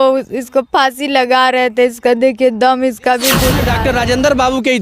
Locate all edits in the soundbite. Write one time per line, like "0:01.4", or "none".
0:03.7